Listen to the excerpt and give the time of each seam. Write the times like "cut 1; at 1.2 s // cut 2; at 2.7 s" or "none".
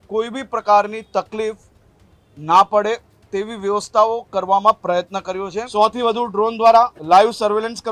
cut 1; at 5.6 s // cut 2; at 7.0 s

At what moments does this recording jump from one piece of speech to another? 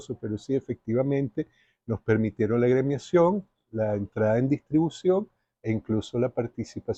none

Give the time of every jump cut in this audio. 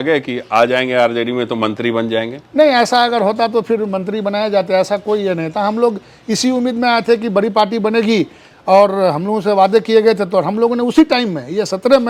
none

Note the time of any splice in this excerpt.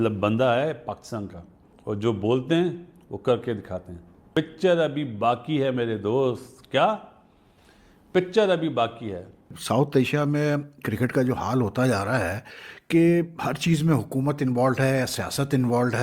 cut 1; at 1.7 s // cut 2; at 4.2 s

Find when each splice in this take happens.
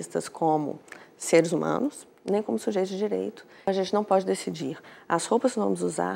cut 1; at 3.7 s

